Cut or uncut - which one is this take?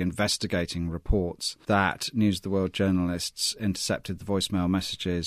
cut